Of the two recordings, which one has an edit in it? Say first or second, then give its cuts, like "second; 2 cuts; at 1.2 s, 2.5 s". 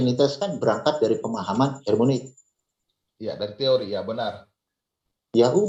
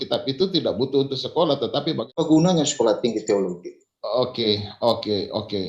second; 1 cut; at 2.0 s